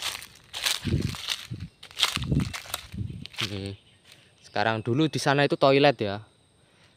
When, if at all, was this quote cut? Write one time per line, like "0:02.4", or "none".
0:02.7